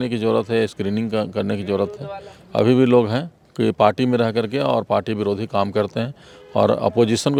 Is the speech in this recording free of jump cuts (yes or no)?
yes